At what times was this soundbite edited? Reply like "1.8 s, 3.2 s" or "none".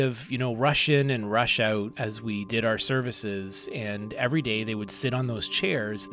1.9 s